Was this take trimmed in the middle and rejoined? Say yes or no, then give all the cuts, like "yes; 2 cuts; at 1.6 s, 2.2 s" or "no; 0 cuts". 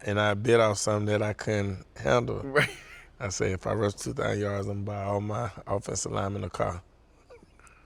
no; 0 cuts